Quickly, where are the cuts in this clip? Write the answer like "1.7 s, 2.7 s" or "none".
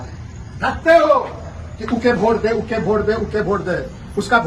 none